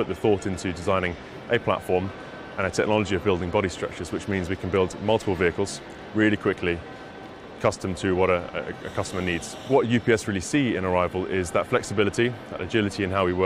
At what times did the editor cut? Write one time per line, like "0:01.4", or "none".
0:09.7